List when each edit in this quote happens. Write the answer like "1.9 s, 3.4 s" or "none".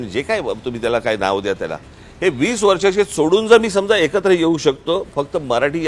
none